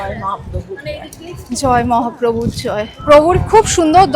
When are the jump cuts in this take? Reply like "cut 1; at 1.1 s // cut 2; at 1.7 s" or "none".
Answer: cut 1; at 2.9 s

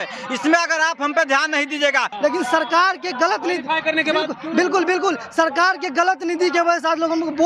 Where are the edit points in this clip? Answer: cut 1; at 2.1 s

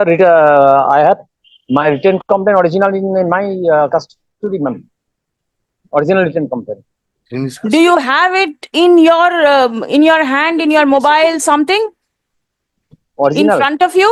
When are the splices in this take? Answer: none

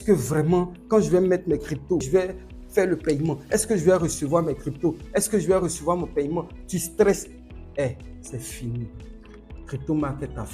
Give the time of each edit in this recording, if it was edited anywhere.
cut 1; at 2.1 s

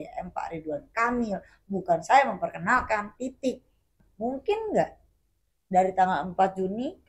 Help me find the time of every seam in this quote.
cut 1; at 4.0 s

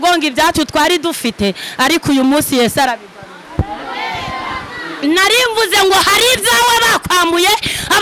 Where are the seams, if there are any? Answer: none

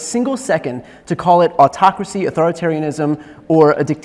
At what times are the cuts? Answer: none

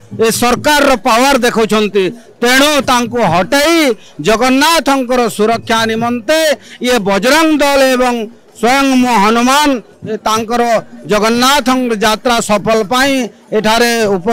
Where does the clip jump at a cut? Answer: none

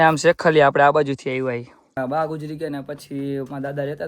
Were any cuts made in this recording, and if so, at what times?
cut 1; at 2.0 s

